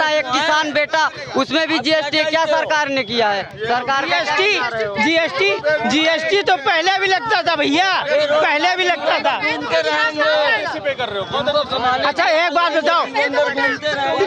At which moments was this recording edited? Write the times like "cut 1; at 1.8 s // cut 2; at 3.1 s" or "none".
none

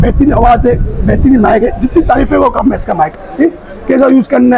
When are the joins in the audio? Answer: cut 1; at 3.2 s

